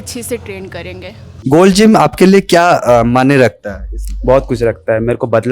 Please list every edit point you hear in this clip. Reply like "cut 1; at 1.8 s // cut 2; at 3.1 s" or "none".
cut 1; at 1.3 s

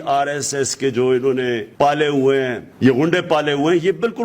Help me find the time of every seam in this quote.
cut 1; at 1.7 s // cut 2; at 2.6 s

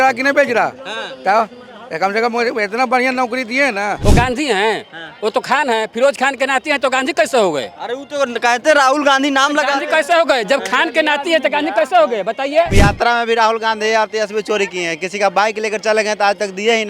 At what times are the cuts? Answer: cut 1; at 4.0 s // cut 2; at 12.7 s

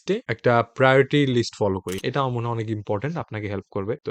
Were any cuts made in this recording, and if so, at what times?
cut 1; at 1.9 s

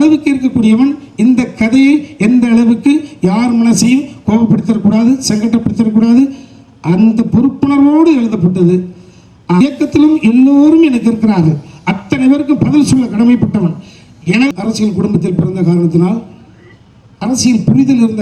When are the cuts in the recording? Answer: cut 1; at 9.6 s // cut 2; at 14.5 s

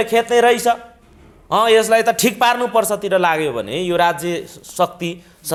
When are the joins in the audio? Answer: none

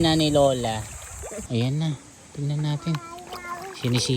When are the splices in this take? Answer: cut 1; at 1.4 s

